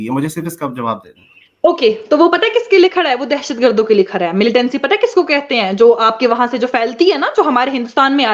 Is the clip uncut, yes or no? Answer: yes